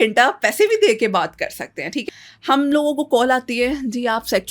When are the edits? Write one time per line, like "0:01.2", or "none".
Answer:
0:02.0